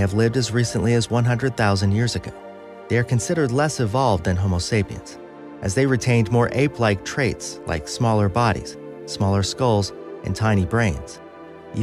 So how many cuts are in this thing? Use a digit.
0